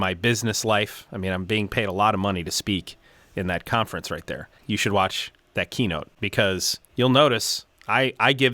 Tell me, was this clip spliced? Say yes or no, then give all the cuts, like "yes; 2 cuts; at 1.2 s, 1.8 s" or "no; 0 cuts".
yes; 2 cuts; at 4.5 s, 6.5 s